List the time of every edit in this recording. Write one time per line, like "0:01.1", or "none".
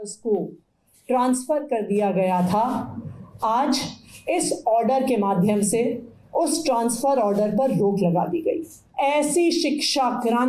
0:08.8